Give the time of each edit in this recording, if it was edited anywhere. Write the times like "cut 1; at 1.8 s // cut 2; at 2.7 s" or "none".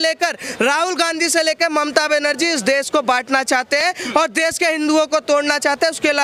none